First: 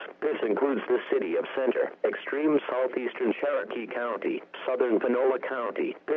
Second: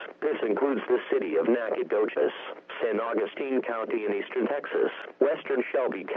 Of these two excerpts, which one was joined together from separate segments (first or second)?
second